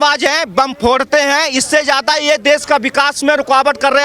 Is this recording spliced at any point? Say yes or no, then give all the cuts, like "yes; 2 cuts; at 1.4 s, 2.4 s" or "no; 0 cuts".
no; 0 cuts